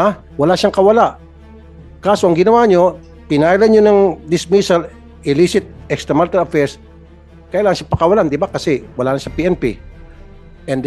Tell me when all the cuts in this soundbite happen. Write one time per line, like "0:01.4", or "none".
none